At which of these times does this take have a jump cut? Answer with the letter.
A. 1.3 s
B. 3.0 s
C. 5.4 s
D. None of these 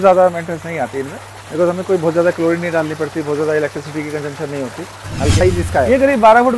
C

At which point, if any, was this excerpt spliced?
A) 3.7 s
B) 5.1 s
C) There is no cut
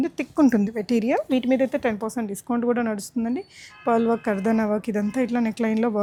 C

